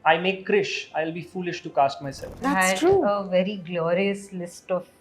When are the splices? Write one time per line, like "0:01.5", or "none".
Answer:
0:02.4